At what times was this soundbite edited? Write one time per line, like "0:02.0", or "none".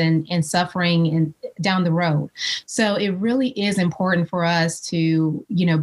none